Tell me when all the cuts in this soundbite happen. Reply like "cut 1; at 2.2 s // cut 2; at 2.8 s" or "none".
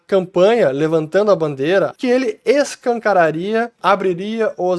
cut 1; at 1.9 s // cut 2; at 3.7 s